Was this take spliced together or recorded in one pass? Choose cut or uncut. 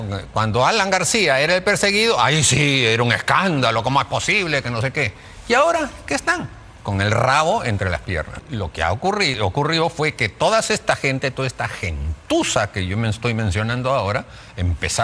cut